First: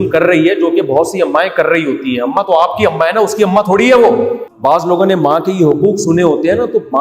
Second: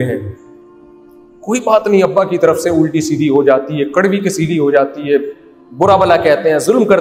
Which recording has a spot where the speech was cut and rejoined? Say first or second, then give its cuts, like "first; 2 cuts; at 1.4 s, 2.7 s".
first; 1 cut; at 4.5 s